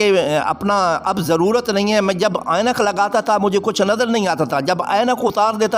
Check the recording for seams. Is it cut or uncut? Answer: uncut